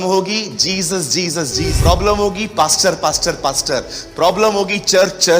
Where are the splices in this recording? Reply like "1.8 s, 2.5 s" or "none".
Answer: 1.7 s